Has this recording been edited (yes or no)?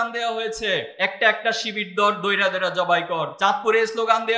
yes